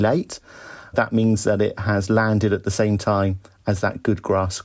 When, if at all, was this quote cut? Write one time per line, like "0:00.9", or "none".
0:00.9